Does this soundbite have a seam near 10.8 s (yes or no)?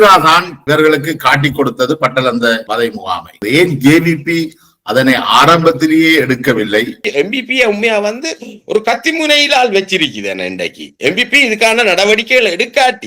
no